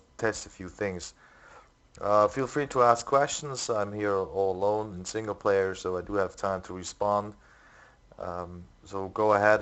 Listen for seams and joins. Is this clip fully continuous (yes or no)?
yes